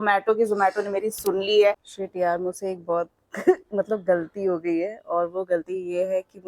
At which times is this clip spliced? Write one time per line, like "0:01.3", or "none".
0:01.9